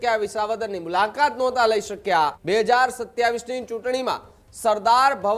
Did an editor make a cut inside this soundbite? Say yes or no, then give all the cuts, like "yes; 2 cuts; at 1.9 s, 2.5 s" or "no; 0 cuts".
yes; 1 cut; at 2.4 s